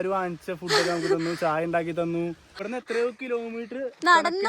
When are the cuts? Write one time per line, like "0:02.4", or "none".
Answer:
0:02.6

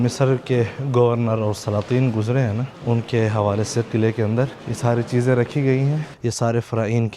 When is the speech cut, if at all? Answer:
0:02.7
0:04.6
0:06.1

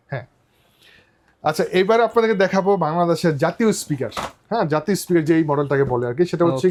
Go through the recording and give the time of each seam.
none

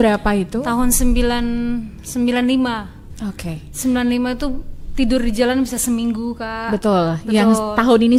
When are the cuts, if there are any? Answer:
none

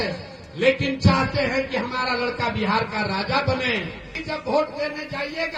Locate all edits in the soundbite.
0:04.2

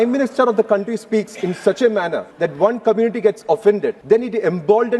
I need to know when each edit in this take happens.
0:02.2
0:04.0

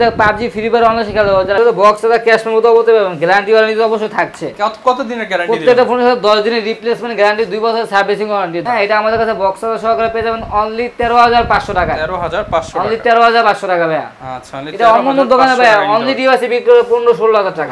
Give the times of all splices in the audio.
0:01.6
0:08.6

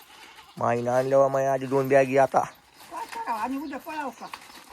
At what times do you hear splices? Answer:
none

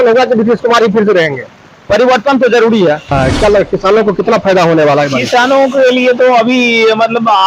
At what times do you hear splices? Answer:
0:03.1

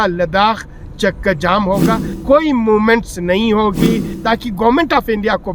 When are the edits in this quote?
0:02.1
0:04.1

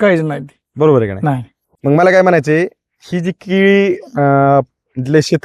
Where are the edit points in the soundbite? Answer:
none

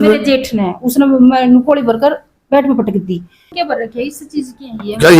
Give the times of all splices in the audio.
0:03.5

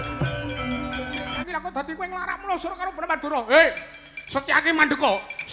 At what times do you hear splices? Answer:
0:01.4

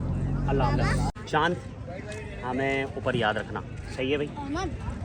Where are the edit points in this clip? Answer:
0:01.1

